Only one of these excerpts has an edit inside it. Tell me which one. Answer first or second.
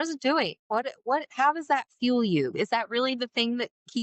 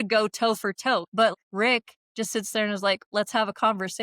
second